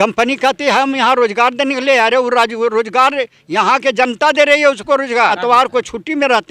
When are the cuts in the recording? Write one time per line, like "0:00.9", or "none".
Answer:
0:05.3

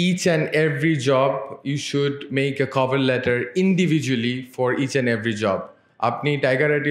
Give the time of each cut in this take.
none

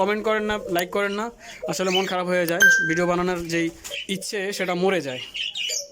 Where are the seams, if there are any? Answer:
0:04.0

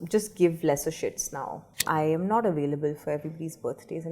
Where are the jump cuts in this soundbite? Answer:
0:01.8

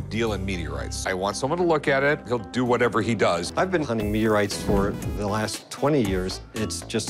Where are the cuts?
none

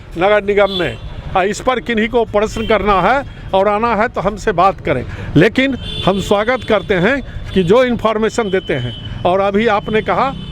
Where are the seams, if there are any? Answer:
none

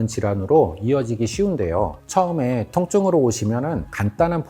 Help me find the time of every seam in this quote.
0:02.0

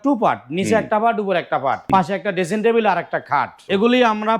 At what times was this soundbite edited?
0:01.9
0:03.6

